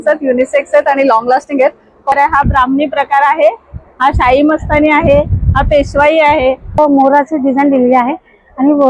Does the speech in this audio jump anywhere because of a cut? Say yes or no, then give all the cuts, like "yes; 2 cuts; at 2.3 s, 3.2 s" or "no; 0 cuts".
yes; 2 cuts; at 2.1 s, 6.7 s